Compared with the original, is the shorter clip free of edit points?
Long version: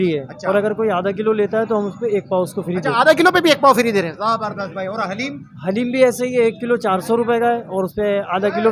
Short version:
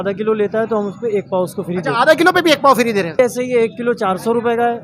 no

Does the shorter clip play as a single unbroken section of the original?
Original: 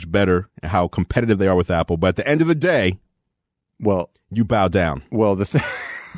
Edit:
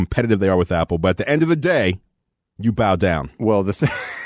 no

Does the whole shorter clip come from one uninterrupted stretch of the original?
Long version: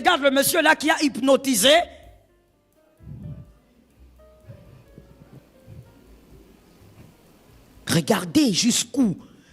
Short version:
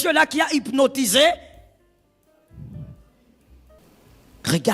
no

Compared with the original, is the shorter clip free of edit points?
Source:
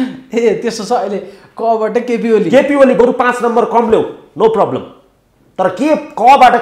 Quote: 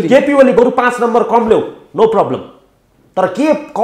yes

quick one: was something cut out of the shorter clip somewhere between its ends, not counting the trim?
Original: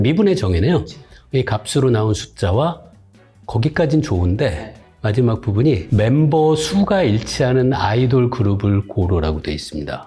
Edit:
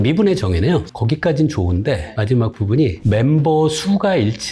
yes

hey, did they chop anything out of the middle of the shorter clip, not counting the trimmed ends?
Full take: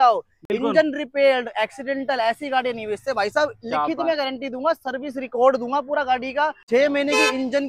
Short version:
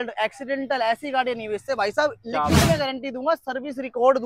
no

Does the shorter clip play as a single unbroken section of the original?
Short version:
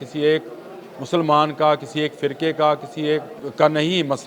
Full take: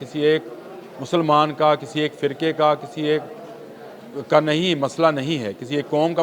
no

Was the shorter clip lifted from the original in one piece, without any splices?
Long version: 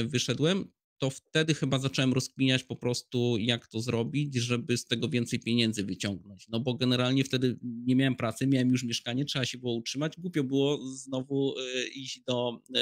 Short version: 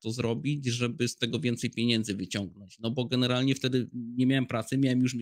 yes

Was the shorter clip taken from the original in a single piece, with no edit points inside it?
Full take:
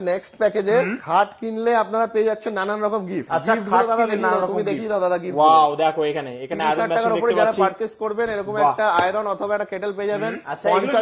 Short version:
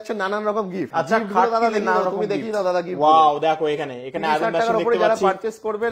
yes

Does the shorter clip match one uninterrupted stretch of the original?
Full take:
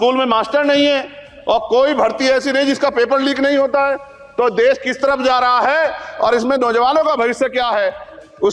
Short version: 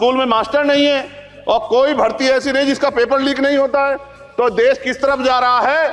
yes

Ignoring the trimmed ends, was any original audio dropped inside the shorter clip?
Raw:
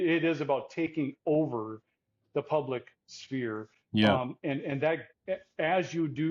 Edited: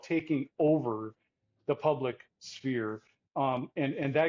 no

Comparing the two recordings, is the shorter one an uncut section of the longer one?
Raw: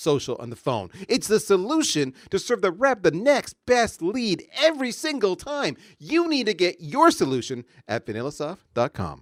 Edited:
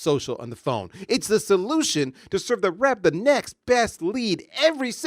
yes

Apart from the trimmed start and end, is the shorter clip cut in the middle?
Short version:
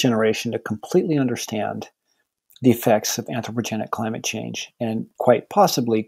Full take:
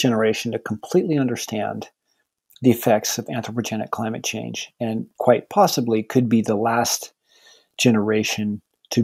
no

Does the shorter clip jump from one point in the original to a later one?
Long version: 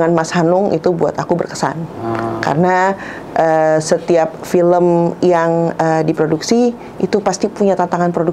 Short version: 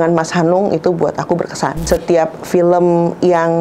yes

